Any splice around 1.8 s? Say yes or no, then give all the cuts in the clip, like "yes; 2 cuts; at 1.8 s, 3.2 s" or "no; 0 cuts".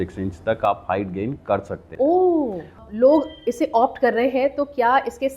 yes; 2 cuts; at 1.8 s, 2.8 s